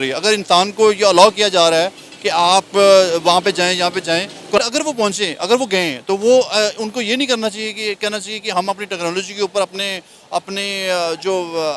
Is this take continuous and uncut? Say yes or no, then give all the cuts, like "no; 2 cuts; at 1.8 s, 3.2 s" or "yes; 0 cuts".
no; 1 cut; at 4.6 s